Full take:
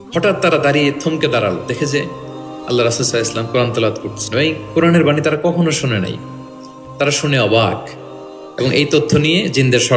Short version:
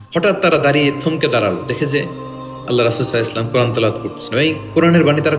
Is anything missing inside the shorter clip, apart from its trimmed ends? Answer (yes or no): no